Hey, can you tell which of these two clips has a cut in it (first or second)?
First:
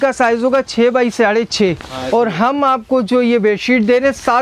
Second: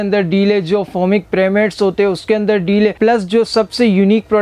second